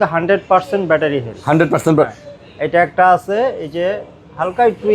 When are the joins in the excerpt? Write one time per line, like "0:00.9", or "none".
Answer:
none